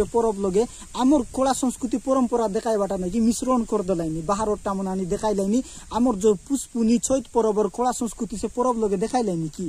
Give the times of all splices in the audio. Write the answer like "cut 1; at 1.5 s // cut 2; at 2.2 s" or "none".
none